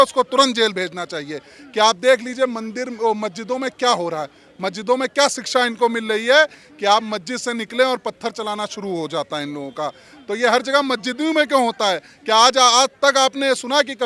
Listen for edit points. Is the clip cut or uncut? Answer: uncut